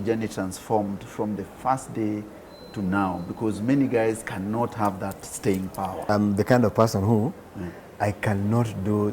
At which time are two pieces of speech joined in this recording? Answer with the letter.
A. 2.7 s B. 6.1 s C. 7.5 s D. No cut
B